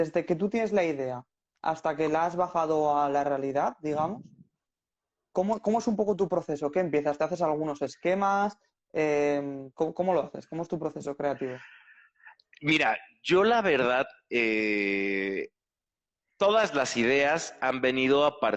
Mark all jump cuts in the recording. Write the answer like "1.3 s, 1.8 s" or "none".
none